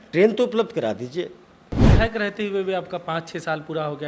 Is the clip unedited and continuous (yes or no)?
no